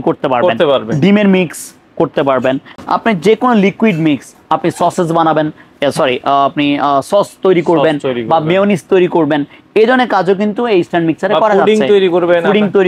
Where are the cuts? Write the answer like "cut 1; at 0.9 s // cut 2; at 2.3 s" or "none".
none